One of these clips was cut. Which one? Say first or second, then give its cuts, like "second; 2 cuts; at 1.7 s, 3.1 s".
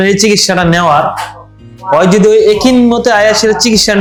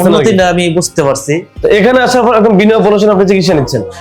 second; 1 cut; at 1.5 s